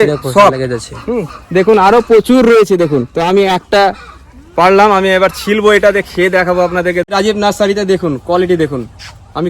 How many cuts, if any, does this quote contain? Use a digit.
1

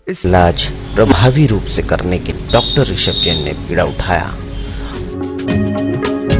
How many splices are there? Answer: 0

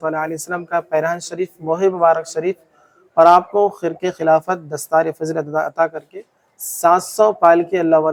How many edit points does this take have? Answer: 0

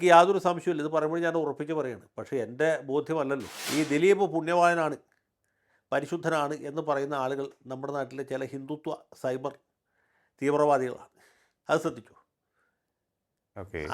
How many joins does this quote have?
1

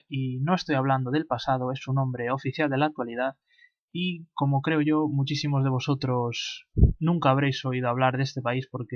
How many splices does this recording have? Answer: 1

